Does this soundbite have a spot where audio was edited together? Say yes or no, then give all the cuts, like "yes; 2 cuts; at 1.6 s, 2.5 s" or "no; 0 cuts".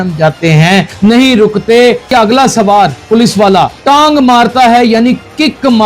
yes; 3 cuts; at 0.9 s, 2.1 s, 3.4 s